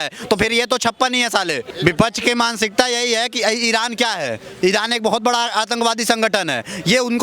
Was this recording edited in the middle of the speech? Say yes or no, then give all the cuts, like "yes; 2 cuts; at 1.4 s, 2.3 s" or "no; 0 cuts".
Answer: yes; 1 cut; at 1.7 s